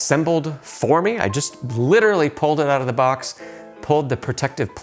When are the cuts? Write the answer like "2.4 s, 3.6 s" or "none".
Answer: none